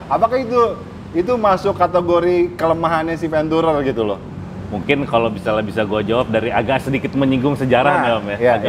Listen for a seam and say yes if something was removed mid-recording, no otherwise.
no